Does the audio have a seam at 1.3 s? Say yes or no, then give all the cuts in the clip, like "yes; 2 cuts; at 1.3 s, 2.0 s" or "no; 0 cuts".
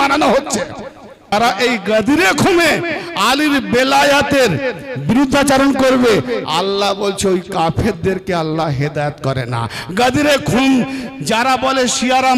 yes; 1 cut; at 1.3 s